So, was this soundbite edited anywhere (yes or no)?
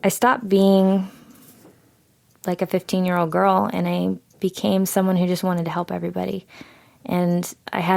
no